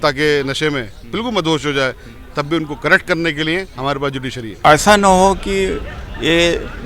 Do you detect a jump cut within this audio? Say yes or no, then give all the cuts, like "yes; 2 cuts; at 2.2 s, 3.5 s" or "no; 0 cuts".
yes; 1 cut; at 4.6 s